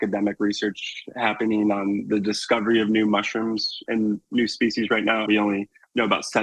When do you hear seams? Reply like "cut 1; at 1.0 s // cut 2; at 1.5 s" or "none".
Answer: cut 1; at 5.2 s